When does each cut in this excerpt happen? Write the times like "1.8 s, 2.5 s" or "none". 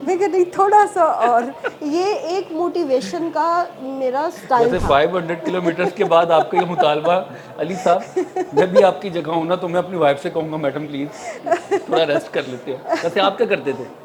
none